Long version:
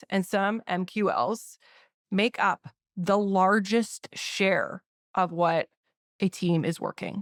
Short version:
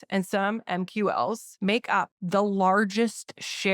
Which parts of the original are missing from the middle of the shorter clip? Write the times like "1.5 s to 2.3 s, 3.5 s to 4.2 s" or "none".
2.0 s to 2.7 s